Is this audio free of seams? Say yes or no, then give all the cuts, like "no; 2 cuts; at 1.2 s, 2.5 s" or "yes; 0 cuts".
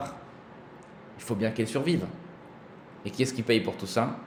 yes; 0 cuts